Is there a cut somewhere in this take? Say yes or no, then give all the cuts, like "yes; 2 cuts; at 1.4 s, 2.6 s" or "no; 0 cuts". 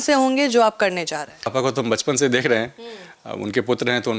yes; 1 cut; at 1.5 s